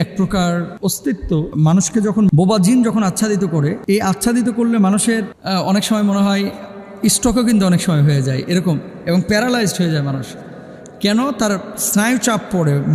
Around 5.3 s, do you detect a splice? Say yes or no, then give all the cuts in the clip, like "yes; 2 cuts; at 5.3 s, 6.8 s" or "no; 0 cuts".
yes; 3 cuts; at 2.3 s, 3.8 s, 5.3 s